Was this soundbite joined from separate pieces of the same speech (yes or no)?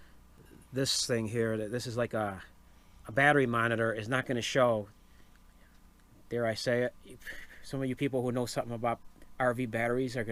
no